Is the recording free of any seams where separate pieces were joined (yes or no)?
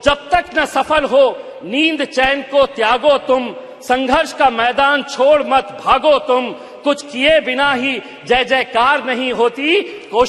yes